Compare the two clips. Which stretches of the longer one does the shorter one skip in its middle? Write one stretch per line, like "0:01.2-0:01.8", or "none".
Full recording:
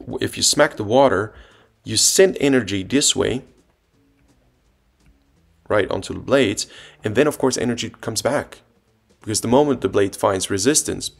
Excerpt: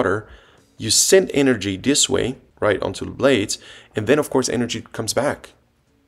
0:03.5-0:05.5